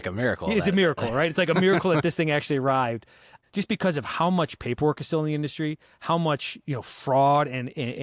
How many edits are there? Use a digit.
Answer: 1